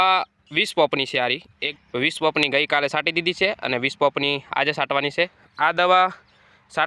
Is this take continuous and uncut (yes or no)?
no